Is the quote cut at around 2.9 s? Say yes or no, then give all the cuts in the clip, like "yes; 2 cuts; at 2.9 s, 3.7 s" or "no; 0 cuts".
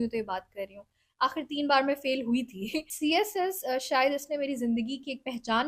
yes; 1 cut; at 2.9 s